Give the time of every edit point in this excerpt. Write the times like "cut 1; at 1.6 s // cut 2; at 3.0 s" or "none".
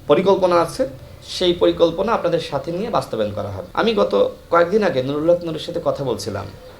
cut 1; at 3.6 s